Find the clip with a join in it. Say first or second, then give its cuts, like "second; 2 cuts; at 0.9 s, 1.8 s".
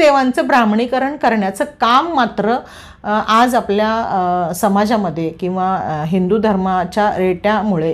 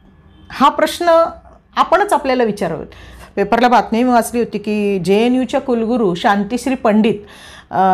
second; 1 cut; at 3.2 s